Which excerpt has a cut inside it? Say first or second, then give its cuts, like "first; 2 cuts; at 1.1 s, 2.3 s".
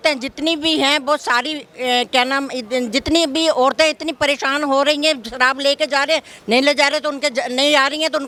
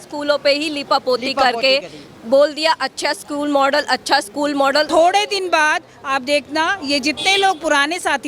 second; 1 cut; at 4.9 s